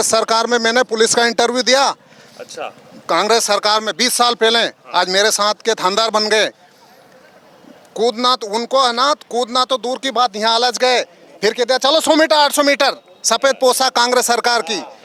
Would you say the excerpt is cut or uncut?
uncut